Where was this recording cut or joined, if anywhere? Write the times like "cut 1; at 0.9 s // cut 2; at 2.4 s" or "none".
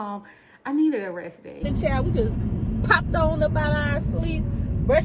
cut 1; at 1.6 s